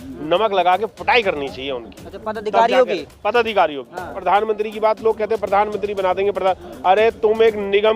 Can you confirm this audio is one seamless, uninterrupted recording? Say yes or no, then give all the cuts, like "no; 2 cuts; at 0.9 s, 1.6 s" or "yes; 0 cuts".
no; 1 cut; at 4.2 s